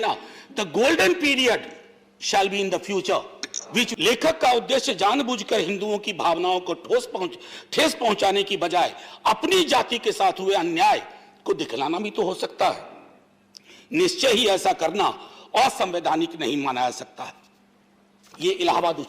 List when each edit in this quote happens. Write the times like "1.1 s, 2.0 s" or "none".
3.9 s